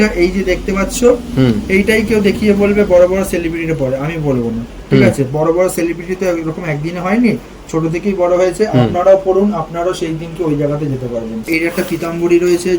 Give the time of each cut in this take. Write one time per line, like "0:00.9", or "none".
0:11.5